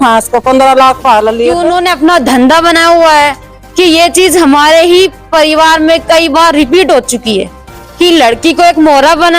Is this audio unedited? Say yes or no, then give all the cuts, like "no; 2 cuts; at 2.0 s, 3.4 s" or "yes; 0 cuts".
no; 1 cut; at 1.6 s